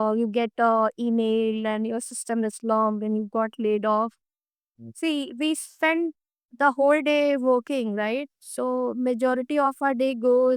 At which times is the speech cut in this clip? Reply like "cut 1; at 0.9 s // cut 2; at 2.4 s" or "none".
none